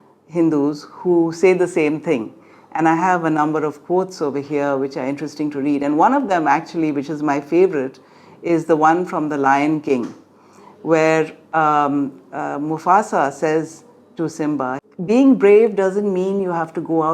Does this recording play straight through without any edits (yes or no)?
no